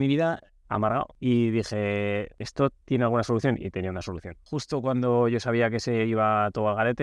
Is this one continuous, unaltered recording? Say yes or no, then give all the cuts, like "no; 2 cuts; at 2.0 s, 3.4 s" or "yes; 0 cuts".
no; 3 cuts; at 1.1 s, 2.4 s, 4.5 s